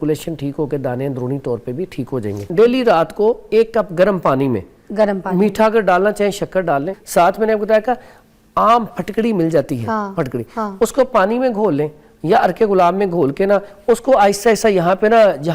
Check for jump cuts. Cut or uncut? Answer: cut